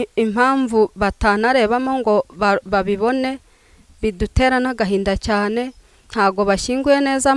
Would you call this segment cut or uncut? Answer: uncut